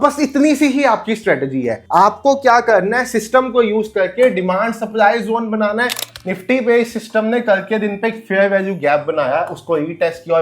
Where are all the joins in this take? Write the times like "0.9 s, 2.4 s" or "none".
6.0 s